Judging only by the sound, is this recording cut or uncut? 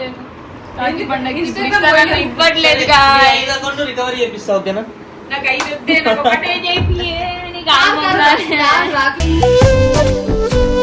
uncut